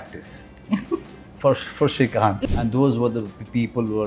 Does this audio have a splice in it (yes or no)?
yes